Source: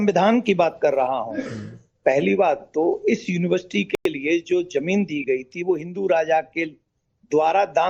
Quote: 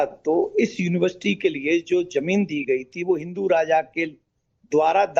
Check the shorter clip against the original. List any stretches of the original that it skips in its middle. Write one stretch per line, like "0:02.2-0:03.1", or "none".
0:03.9-0:04.0